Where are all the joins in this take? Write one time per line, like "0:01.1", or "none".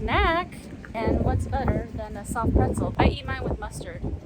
0:00.9
0:02.9